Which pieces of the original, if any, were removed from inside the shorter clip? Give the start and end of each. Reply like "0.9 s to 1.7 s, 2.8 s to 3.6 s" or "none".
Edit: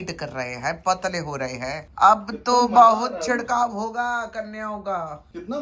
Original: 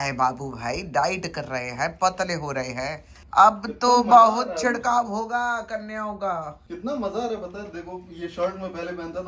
3.0 s to 3.2 s